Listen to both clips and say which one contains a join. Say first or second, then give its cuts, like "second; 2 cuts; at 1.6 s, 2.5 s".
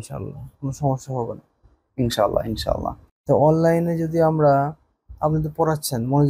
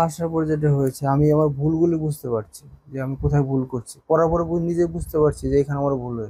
first; 1 cut; at 3.1 s